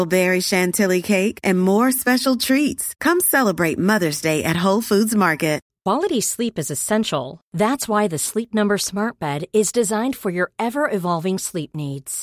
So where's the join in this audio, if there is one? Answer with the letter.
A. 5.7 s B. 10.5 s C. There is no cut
A